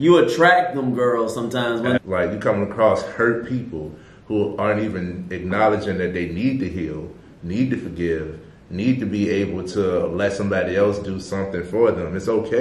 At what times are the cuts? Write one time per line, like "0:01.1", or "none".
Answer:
0:02.0